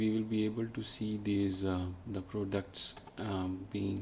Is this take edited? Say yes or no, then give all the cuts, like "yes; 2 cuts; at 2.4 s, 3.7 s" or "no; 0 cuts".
no; 0 cuts